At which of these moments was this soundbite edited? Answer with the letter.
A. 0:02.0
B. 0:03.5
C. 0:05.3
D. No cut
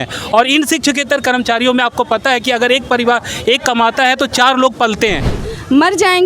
C